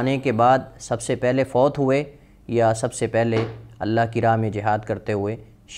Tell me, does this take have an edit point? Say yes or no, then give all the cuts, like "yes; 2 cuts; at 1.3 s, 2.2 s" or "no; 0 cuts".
no; 0 cuts